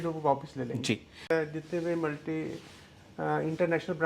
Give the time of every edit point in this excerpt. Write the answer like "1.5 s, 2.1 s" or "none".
1.3 s